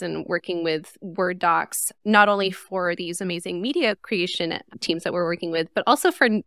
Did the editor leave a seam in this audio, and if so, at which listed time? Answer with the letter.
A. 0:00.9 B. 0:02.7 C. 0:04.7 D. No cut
A